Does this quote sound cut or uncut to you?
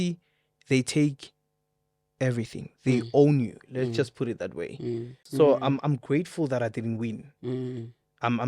cut